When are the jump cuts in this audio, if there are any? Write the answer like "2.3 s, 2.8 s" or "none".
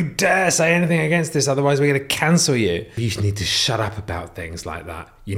3.1 s